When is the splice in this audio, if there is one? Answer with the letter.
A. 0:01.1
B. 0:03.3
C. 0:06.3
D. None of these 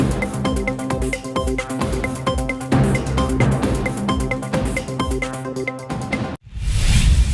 C